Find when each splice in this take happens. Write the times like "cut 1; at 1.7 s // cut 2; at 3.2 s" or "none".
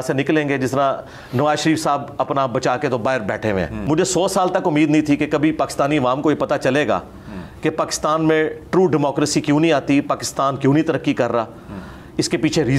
cut 1; at 3.8 s